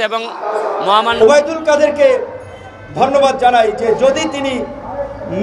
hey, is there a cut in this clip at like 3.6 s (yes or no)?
no